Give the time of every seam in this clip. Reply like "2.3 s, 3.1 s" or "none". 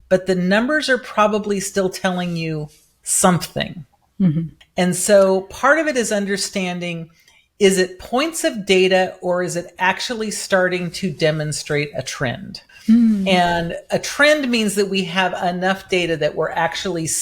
none